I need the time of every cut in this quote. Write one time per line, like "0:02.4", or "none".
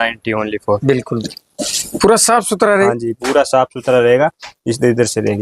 0:01.2